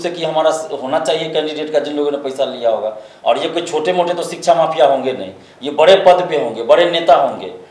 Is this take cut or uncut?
uncut